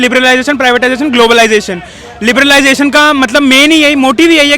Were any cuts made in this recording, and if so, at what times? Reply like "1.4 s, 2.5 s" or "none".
none

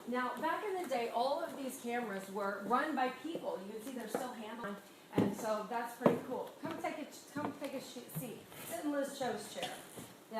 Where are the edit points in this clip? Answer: 4.7 s

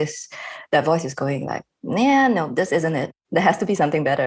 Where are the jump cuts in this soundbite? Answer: 3.1 s

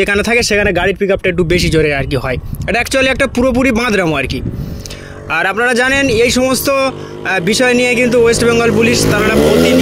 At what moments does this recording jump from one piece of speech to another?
none

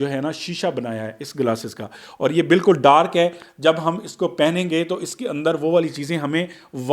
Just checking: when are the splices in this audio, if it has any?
none

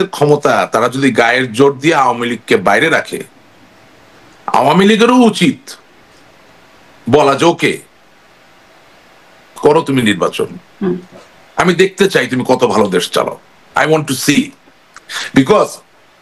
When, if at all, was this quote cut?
none

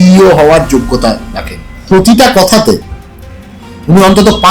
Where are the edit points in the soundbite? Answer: 1.9 s

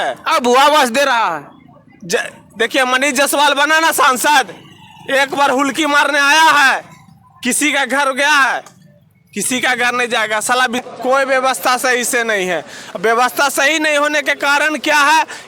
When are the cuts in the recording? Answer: 10.8 s

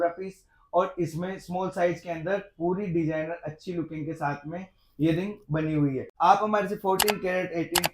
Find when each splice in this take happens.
6.1 s

